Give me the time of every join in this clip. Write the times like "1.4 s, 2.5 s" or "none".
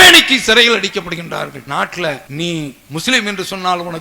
1.6 s, 2.3 s